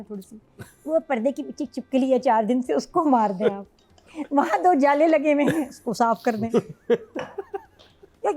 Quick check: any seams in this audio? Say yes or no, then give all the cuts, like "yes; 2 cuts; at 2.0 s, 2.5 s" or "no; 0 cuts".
no; 0 cuts